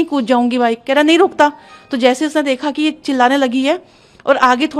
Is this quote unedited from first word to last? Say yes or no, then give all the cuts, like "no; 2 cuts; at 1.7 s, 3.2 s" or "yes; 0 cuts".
yes; 0 cuts